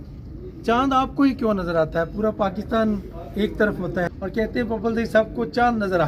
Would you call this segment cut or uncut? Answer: cut